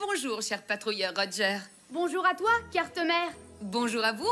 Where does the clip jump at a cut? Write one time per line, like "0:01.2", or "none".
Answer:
none